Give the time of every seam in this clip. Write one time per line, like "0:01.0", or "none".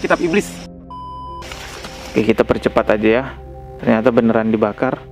0:01.1